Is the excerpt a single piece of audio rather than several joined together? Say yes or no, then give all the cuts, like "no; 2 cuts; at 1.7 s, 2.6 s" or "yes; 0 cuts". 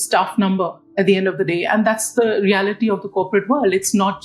yes; 0 cuts